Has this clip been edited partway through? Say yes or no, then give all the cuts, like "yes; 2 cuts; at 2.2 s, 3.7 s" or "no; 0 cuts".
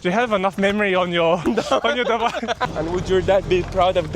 yes; 1 cut; at 2.6 s